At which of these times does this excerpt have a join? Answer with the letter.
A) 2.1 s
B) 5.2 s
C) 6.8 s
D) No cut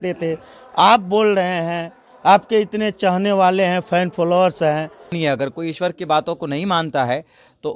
B